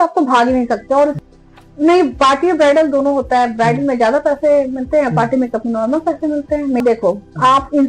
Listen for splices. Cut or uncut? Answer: cut